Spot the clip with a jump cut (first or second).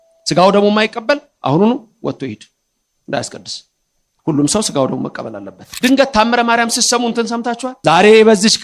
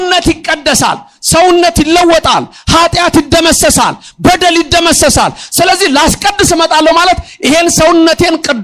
first